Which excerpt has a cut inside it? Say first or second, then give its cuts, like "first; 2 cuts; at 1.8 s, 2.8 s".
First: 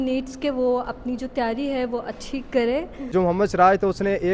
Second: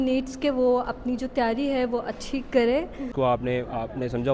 first; 1 cut; at 3.0 s